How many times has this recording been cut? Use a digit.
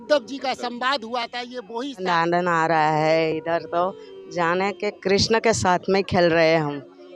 1